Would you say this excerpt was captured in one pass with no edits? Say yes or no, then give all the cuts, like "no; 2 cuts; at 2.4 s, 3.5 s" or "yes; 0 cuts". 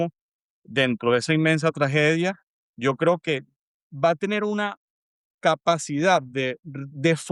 yes; 0 cuts